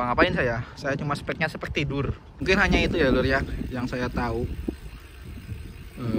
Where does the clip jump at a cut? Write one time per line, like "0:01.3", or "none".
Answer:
0:02.3